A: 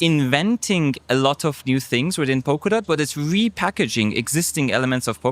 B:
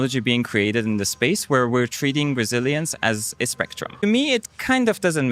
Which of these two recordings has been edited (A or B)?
B